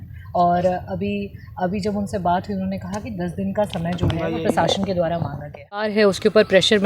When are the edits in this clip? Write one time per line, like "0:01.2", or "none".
0:05.9